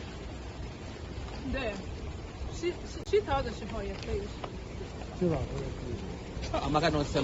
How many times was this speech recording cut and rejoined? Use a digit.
1